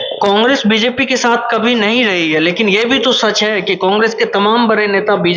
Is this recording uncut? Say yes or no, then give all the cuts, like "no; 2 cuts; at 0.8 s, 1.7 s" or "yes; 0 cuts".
yes; 0 cuts